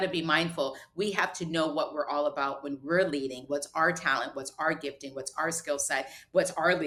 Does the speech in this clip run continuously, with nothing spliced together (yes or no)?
yes